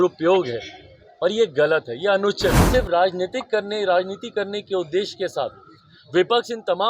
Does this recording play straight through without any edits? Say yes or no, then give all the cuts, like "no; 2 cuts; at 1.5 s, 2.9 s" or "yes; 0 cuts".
no; 1 cut; at 2.6 s